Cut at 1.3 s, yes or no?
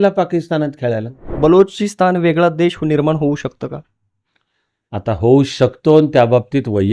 yes